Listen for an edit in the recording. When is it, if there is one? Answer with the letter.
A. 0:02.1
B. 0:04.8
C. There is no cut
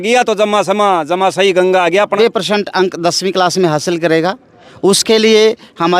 A